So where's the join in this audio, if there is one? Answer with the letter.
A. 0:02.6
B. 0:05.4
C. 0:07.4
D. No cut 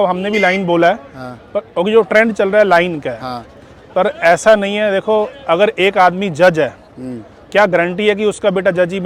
D